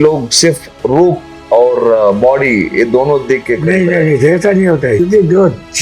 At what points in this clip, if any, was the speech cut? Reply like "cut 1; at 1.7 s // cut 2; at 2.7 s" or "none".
cut 1; at 1.3 s // cut 2; at 5.0 s

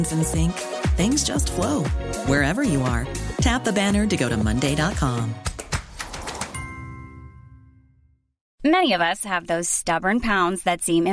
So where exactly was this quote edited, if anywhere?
cut 1; at 8.5 s

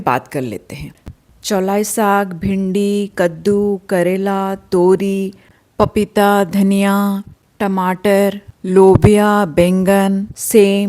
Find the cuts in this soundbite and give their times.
cut 1; at 1.1 s

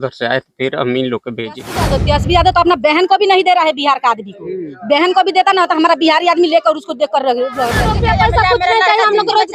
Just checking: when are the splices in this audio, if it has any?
cut 1; at 1.9 s // cut 2; at 7.8 s

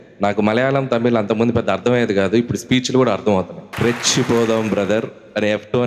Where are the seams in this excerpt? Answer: cut 1; at 3.6 s

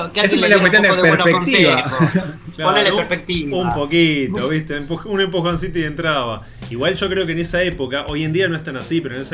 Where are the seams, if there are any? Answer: none

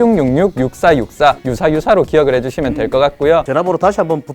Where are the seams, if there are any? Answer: cut 1; at 1.5 s // cut 2; at 3.4 s

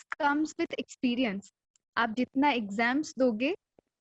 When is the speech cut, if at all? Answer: none

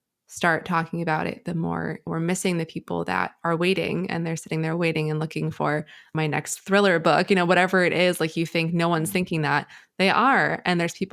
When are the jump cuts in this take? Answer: cut 1; at 2.1 s // cut 2; at 6.1 s

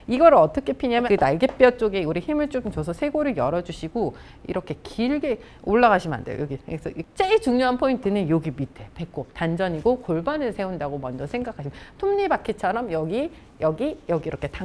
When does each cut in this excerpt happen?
cut 1; at 1.0 s // cut 2; at 6.9 s

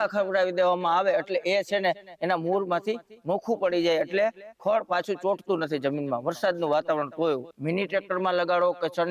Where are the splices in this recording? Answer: cut 1; at 7.5 s

